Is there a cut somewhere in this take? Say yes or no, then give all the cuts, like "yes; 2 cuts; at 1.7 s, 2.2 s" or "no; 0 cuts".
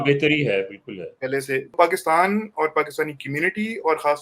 yes; 1 cut; at 1.7 s